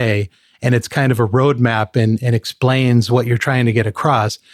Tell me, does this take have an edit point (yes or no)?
no